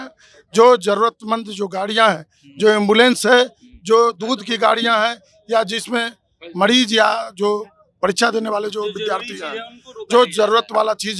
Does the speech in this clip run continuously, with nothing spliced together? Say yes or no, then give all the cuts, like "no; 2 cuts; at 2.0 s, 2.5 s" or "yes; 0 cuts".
yes; 0 cuts